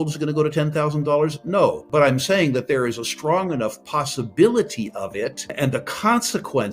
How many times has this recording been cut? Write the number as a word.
two